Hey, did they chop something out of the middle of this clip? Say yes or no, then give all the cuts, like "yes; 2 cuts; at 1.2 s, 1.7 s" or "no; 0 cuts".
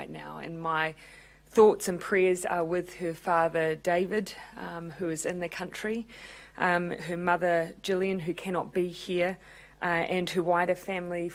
no; 0 cuts